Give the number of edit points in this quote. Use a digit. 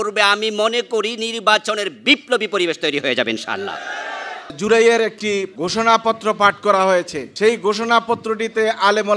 3